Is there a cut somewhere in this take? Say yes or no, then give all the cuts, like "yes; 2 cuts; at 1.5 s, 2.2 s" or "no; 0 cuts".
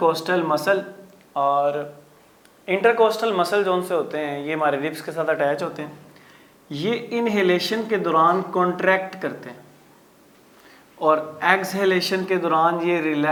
no; 0 cuts